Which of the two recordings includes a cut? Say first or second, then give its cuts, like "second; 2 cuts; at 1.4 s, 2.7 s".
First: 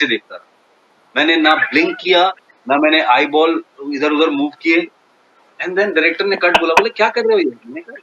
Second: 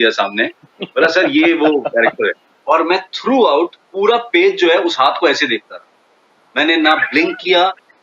second; 1 cut; at 2.5 s